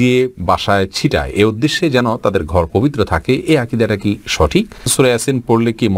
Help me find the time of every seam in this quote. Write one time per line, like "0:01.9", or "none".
0:04.9